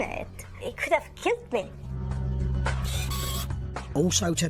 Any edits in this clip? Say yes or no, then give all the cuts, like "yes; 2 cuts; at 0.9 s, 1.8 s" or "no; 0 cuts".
no; 0 cuts